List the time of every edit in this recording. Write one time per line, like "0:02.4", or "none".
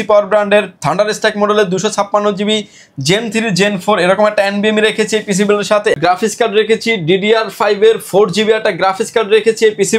0:06.0